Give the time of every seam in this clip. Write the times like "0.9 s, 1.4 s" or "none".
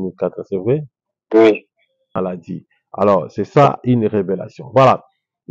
2.2 s

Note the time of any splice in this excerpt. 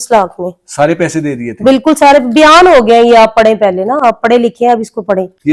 none

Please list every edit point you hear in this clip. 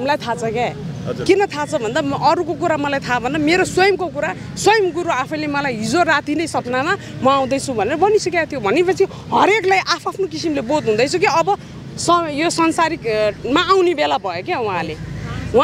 none

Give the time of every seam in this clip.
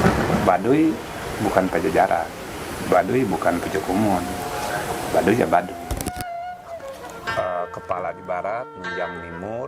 6.0 s

